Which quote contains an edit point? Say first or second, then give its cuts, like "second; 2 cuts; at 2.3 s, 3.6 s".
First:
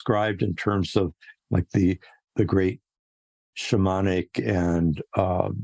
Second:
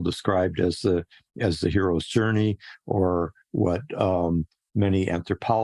first; 1 cut; at 2.1 s